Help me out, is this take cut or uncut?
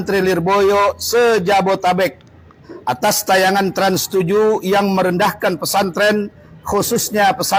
uncut